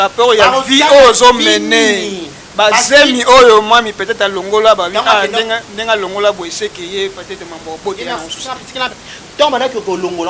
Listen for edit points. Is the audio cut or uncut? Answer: cut